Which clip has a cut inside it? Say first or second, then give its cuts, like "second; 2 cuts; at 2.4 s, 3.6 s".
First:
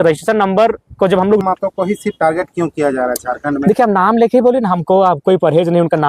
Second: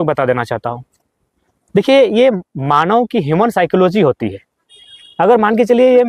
first; 1 cut; at 1.4 s